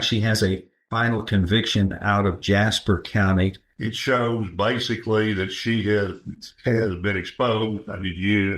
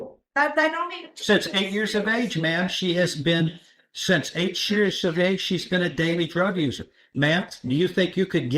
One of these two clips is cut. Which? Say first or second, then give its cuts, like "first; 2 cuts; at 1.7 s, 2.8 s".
first; 1 cut; at 3.7 s